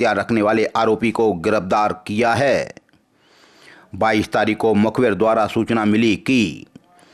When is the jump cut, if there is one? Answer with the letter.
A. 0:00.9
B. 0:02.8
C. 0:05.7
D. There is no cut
D